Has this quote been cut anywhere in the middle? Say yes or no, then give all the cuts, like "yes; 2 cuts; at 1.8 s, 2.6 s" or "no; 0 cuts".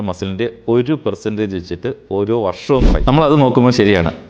yes; 1 cut; at 2.9 s